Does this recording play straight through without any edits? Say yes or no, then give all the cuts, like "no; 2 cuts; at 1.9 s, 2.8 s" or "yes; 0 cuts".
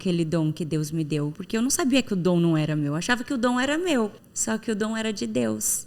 no; 2 cuts; at 1.4 s, 4.3 s